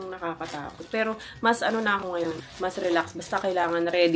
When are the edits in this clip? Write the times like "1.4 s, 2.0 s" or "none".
none